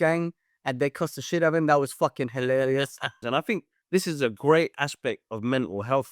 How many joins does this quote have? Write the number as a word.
one